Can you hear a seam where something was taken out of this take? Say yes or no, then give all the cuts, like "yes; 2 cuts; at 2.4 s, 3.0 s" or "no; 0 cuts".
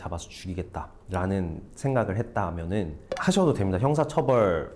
no; 0 cuts